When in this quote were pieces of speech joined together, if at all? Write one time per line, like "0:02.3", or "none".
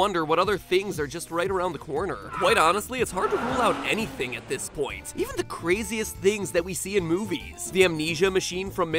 0:01.5